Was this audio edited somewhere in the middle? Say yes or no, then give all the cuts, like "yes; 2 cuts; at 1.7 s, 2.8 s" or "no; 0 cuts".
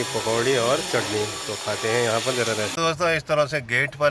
yes; 1 cut; at 2.7 s